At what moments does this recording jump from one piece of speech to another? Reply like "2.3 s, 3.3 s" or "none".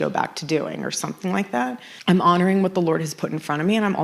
1.8 s